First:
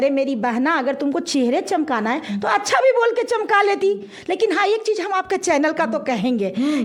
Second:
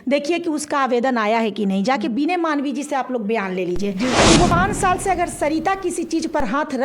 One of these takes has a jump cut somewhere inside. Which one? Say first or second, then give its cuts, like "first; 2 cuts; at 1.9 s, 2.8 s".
second; 1 cut; at 4.5 s